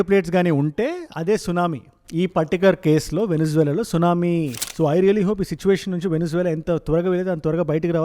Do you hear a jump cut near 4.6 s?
yes; 1 cut; at 4.6 s

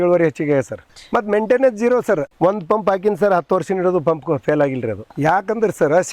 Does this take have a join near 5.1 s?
yes; 1 cut; at 5.1 s

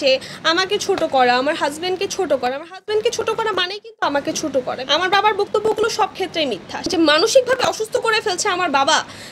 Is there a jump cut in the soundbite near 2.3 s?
no; 2 cuts; at 4.8 s, 6.8 s

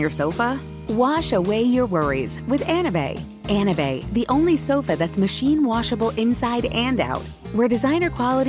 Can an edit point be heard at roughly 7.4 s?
no; 0 cuts

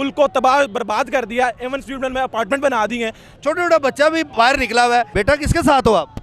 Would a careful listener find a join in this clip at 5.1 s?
yes; 2 cuts; at 3.2 s, 5.1 s

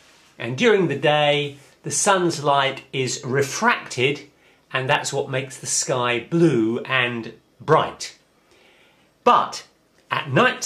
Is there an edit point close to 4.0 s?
yes; 1 cut; at 4.0 s

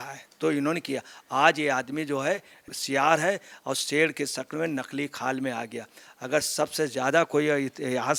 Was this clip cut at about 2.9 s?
no; 0 cuts

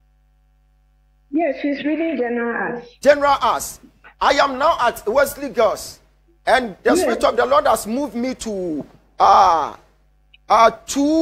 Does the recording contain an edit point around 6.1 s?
no; 0 cuts

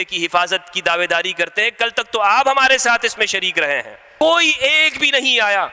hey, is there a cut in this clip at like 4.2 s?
yes; 1 cut; at 4.2 s

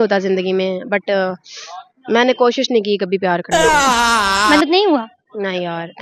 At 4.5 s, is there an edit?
no; 0 cuts

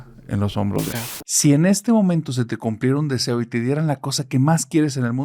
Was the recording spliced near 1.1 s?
yes; 1 cut; at 1.1 s

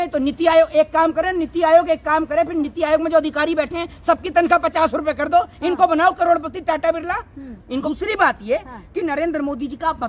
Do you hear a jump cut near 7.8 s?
yes; 1 cut; at 7.8 s

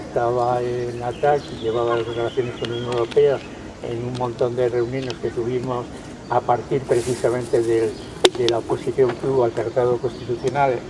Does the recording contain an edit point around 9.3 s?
yes; 1 cut; at 9.3 s

